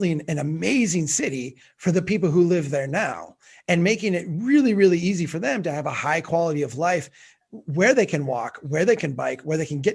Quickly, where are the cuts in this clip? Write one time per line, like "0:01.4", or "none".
none